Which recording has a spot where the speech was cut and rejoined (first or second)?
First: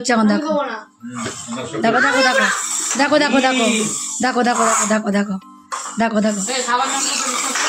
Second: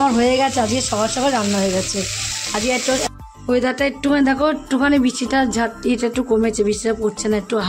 second